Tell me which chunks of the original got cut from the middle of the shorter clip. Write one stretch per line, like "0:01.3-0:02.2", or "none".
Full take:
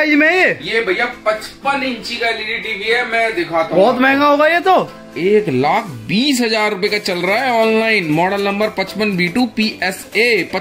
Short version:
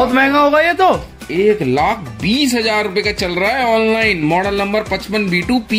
none